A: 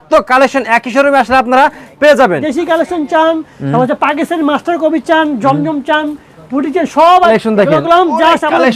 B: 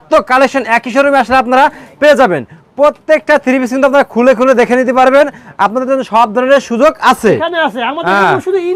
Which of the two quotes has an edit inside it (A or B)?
A